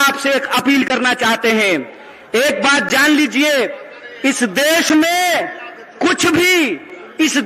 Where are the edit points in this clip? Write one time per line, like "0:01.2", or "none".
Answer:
none